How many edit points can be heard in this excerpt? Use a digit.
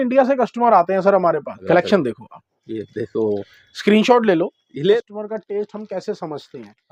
2